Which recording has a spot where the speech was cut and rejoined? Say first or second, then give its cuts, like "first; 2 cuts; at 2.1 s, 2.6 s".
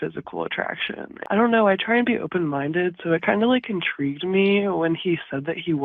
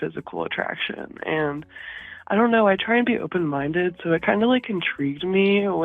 first; 1 cut; at 1.1 s